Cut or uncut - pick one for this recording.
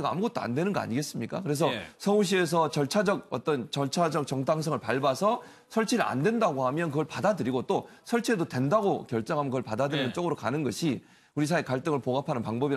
cut